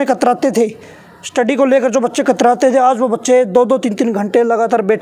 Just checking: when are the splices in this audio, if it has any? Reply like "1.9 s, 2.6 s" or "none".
none